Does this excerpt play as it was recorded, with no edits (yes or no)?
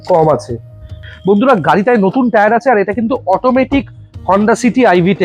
no